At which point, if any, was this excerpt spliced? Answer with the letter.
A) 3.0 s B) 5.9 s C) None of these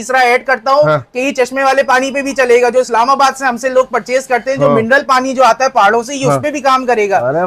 C